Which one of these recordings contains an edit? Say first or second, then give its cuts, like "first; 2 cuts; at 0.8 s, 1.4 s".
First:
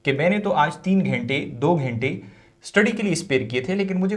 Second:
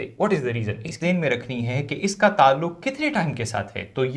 second; 1 cut; at 1.0 s